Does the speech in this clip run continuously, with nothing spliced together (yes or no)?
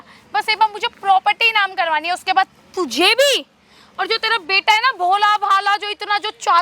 yes